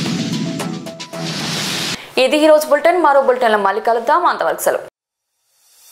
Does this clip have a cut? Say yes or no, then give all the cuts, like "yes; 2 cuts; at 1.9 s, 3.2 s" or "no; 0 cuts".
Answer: no; 0 cuts